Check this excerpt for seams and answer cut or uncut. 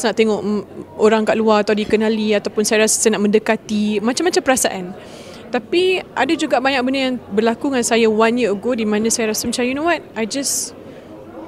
uncut